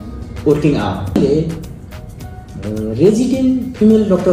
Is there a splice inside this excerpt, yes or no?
yes